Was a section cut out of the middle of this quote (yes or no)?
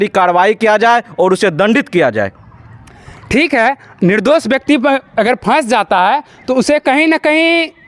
no